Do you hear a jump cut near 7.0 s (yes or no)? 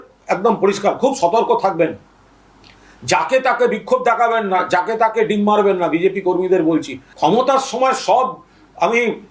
yes